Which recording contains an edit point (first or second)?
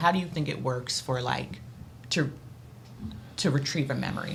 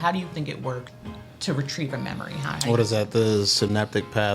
second